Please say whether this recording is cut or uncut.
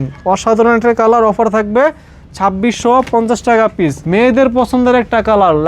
cut